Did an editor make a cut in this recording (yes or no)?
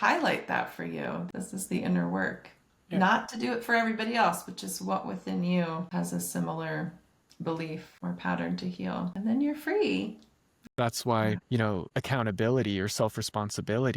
yes